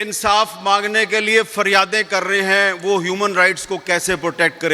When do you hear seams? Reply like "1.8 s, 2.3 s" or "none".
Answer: none